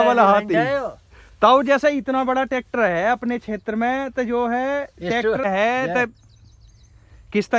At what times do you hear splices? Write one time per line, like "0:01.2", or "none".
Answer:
0:05.4

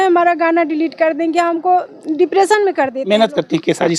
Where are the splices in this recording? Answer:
0:03.1

